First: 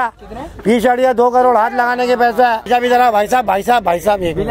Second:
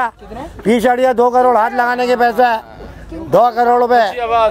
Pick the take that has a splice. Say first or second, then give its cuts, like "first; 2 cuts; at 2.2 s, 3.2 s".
first; 1 cut; at 2.7 s